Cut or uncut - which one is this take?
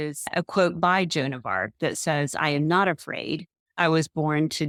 uncut